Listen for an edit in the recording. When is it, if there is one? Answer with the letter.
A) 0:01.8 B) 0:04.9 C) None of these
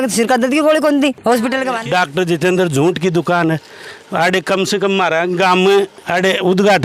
A